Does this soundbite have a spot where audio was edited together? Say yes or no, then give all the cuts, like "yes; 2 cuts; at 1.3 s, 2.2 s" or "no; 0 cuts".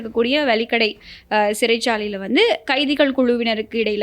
no; 0 cuts